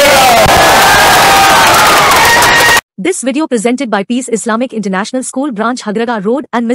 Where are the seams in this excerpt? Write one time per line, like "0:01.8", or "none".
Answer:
0:02.8